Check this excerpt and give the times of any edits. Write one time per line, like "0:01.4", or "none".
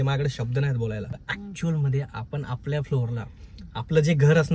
0:01.3